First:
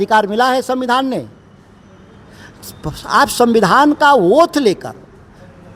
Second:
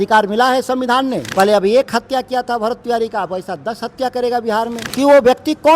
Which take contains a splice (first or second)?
second